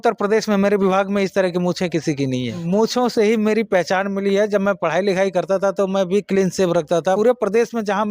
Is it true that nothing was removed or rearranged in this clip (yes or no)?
no